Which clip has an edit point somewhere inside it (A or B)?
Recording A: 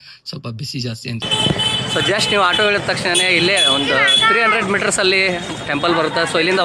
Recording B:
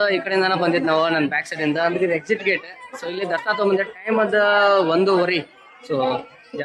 A